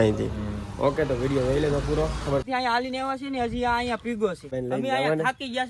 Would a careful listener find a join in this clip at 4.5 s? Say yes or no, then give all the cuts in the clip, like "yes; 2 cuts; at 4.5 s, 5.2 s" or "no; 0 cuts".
yes; 2 cuts; at 2.4 s, 4.5 s